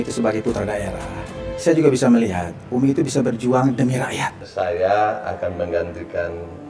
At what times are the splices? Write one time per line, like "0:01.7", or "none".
0:04.4